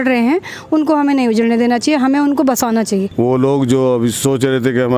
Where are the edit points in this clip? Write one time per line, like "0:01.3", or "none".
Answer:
0:03.1